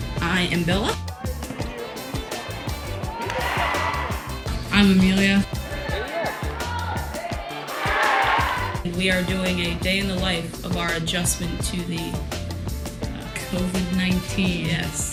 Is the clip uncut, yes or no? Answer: yes